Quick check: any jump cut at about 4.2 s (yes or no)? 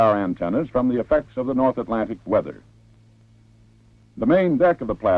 no